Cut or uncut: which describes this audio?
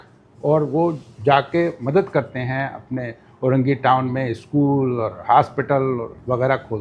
uncut